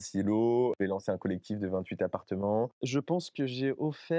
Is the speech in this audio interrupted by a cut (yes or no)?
yes